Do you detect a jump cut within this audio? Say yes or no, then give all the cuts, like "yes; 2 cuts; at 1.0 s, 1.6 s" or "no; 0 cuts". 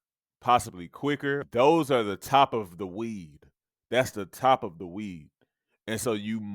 yes; 1 cut; at 1.4 s